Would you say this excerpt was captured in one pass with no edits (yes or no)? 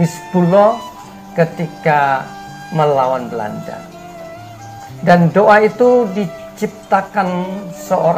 yes